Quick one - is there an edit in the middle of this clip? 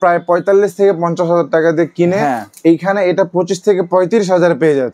no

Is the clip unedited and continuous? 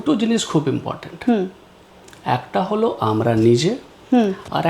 yes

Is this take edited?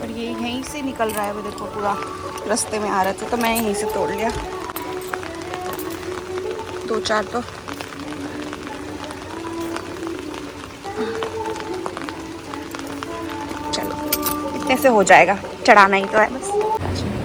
no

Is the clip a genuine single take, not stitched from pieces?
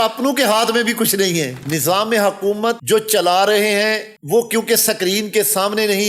no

